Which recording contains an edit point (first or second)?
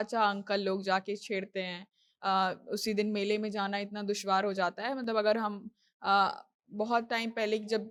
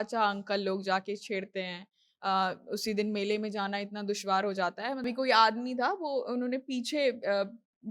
second